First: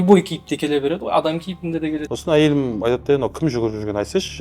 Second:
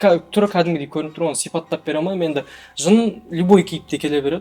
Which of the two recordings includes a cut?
first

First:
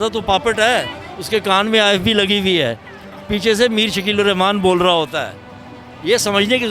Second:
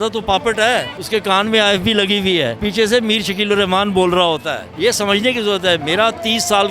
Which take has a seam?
second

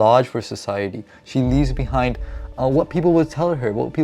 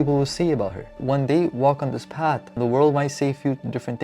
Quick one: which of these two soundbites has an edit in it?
second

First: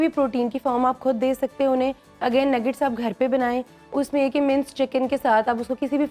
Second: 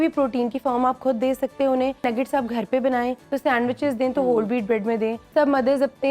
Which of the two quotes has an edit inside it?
second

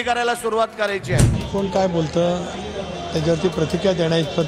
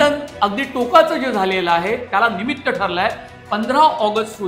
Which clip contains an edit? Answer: first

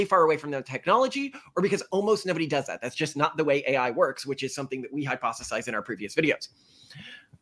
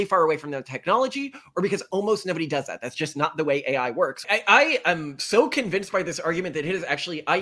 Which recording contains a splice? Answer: second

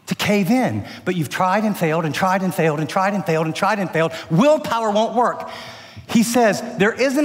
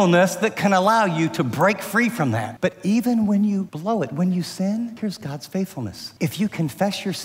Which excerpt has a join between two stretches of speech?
second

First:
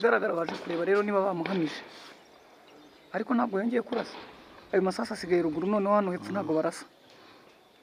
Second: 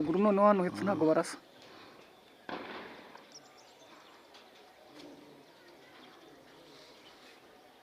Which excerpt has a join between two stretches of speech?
second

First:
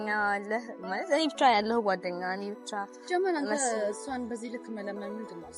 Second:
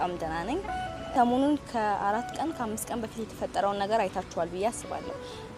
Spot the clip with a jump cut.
second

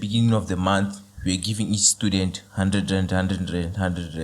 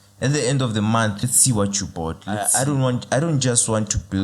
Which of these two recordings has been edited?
second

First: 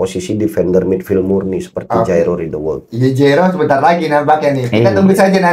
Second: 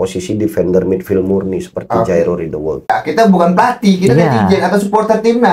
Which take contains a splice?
second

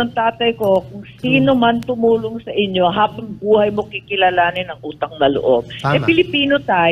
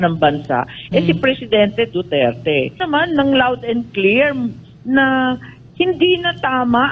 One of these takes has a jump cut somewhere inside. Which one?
second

